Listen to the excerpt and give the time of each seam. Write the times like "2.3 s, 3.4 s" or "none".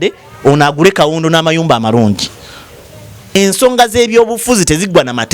3.3 s